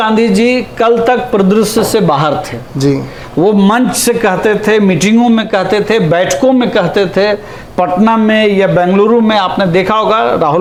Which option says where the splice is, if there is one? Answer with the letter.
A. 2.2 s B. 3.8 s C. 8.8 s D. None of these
D